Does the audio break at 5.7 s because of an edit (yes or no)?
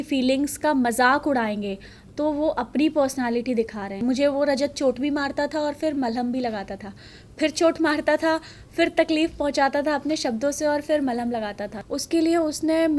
no